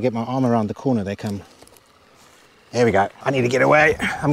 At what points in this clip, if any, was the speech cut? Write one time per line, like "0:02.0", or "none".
0:03.2